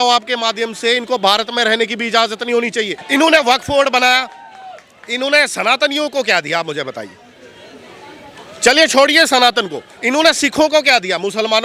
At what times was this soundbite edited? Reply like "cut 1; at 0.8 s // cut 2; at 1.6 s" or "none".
cut 1; at 3.0 s

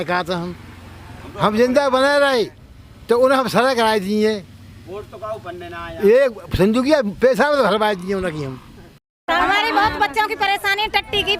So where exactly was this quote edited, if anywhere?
cut 1; at 9.2 s

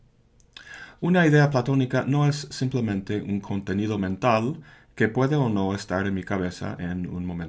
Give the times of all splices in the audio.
none

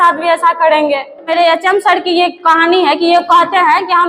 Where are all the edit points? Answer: cut 1; at 1.1 s

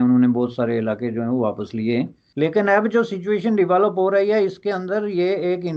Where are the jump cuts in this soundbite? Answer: cut 1; at 2.2 s

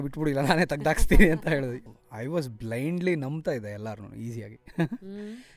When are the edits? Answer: cut 1; at 1.8 s

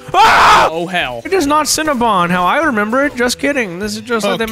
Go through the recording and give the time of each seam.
cut 1; at 1.1 s

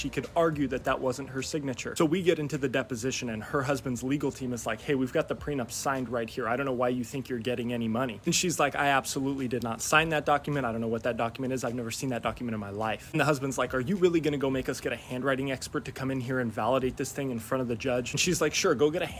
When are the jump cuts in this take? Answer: none

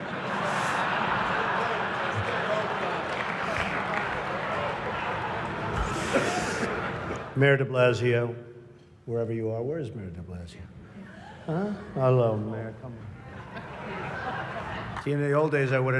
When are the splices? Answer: cut 1; at 2.3 s

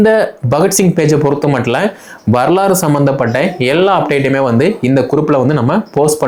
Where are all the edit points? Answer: none

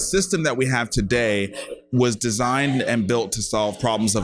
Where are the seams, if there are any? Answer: none

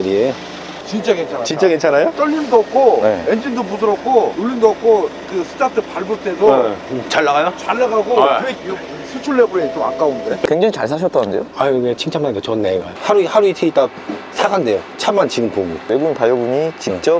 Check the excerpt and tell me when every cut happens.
cut 1; at 2.1 s // cut 2; at 4.4 s // cut 3; at 10.4 s // cut 4; at 12.9 s // cut 5; at 15.8 s

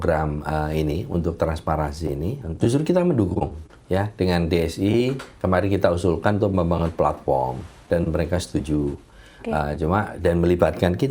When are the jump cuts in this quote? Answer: cut 1; at 2.5 s

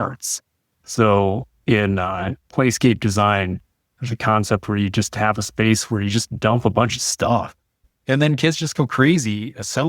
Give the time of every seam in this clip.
cut 1; at 7.7 s

